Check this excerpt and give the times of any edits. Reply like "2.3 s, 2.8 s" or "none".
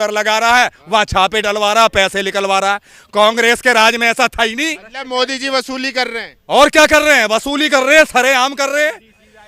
none